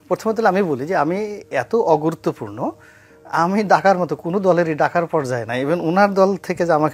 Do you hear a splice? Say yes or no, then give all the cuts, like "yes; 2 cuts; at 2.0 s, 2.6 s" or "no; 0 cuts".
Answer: no; 0 cuts